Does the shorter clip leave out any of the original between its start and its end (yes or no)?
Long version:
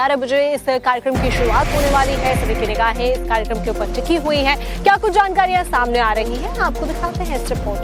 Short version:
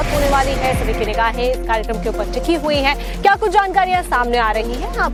no